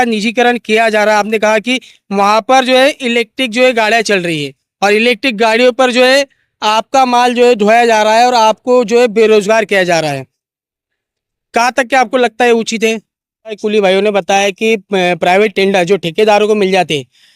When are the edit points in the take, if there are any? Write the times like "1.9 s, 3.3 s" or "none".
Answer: 13.6 s